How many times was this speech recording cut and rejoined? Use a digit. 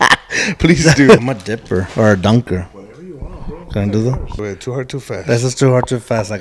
2